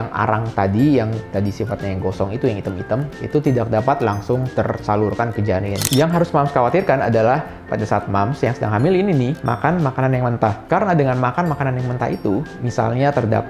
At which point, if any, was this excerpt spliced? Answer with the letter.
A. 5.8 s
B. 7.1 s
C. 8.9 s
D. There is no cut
A